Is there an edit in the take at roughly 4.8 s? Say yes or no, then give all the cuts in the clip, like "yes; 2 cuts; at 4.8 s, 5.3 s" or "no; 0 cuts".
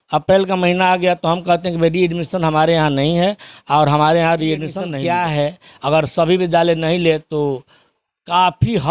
yes; 1 cut; at 4.8 s